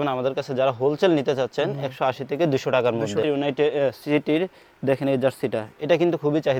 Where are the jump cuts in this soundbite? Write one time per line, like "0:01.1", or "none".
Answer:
0:03.2